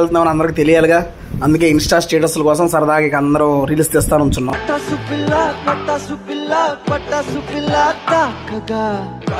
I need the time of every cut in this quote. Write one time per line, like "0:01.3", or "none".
none